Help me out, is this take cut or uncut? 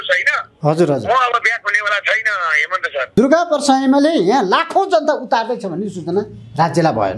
cut